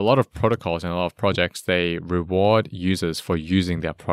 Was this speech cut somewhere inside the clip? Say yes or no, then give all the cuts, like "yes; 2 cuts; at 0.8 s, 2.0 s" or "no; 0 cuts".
no; 0 cuts